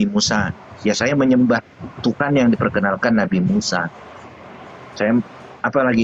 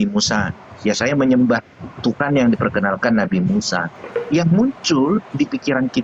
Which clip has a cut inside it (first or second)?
second